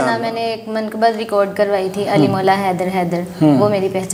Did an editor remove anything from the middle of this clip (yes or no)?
no